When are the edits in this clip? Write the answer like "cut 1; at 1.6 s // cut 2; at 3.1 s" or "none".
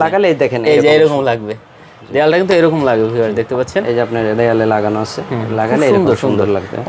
none